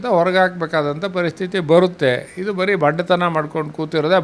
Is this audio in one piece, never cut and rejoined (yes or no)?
yes